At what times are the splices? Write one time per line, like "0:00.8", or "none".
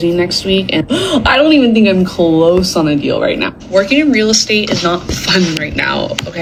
none